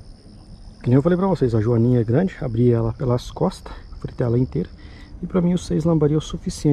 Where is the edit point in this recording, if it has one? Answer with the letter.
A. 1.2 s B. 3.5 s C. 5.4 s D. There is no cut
D